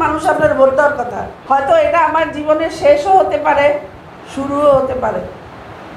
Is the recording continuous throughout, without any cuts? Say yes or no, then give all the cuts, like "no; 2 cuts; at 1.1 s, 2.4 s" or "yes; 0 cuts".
no; 1 cut; at 1.3 s